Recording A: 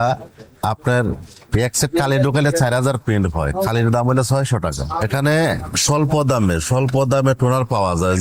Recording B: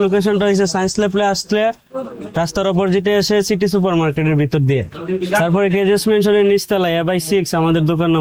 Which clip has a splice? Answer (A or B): A